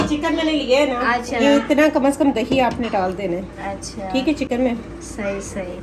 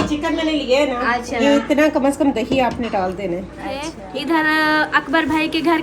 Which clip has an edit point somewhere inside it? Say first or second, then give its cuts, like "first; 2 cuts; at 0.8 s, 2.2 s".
second; 1 cut; at 4.0 s